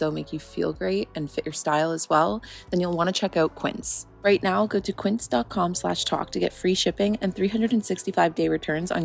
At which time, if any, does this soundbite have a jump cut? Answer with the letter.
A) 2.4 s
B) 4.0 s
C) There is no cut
B